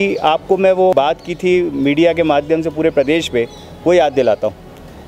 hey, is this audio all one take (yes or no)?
no